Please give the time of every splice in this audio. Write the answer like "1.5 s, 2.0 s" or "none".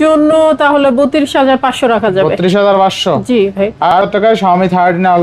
4.0 s